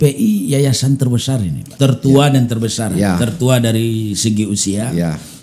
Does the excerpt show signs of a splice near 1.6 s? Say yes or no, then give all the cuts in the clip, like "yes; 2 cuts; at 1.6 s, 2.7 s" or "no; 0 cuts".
yes; 1 cut; at 1.6 s